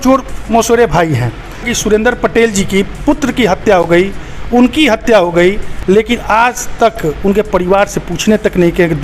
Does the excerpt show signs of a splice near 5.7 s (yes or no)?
yes